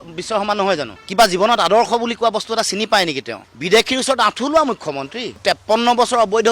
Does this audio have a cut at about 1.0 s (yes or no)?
yes